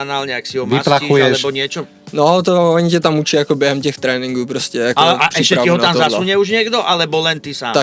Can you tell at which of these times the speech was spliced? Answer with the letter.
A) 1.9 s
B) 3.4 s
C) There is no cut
C